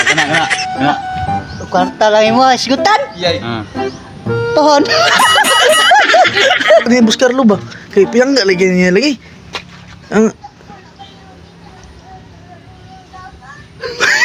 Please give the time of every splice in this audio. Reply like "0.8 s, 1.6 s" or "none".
6.8 s